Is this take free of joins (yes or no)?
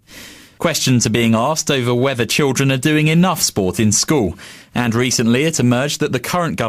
no